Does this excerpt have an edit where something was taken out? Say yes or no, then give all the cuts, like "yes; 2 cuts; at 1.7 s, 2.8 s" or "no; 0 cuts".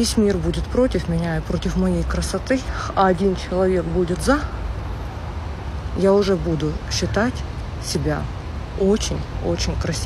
no; 0 cuts